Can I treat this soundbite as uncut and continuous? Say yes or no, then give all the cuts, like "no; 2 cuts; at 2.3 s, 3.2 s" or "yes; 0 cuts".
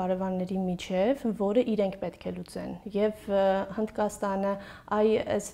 yes; 0 cuts